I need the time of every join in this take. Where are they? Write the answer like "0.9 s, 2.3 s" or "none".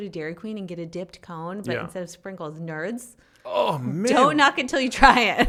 none